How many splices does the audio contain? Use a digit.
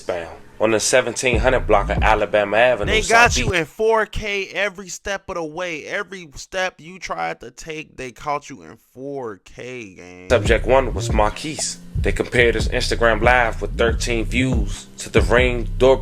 1